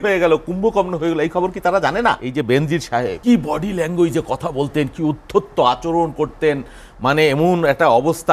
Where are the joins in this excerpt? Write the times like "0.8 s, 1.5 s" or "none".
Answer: 2.2 s, 3.2 s